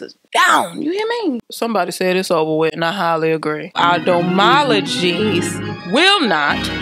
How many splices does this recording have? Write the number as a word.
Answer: two